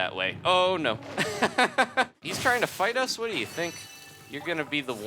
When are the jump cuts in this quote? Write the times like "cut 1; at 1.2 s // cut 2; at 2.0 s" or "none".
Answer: cut 1; at 2.2 s